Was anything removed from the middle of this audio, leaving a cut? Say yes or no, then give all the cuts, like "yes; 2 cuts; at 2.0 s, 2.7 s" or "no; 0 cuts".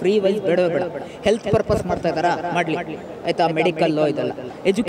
no; 0 cuts